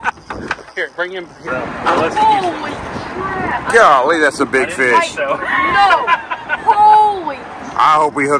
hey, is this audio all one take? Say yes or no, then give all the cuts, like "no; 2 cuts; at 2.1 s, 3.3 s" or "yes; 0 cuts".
no; 1 cut; at 1.4 s